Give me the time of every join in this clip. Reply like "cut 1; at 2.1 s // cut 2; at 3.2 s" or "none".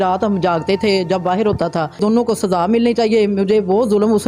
cut 1; at 2.0 s